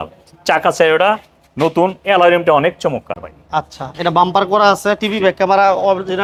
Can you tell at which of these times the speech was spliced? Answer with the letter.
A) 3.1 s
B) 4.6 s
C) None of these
C